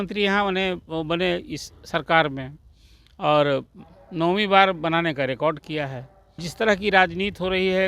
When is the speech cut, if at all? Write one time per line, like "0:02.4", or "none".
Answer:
0:06.4